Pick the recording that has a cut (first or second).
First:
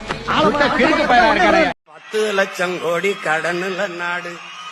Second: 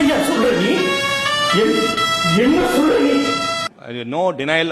first